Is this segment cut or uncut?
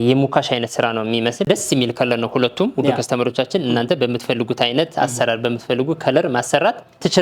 cut